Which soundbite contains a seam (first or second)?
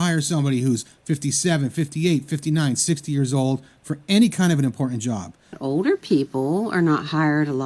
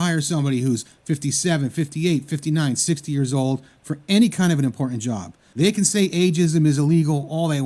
first